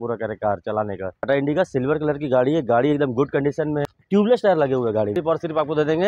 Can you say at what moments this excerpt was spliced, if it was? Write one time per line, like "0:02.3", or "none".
0:01.3
0:03.9
0:05.1